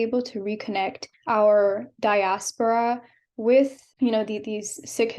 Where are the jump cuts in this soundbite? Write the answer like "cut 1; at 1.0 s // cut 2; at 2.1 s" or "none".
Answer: cut 1; at 1.1 s // cut 2; at 3.8 s